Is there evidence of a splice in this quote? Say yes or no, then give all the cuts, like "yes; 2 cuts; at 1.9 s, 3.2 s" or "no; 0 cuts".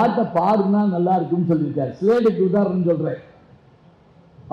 no; 0 cuts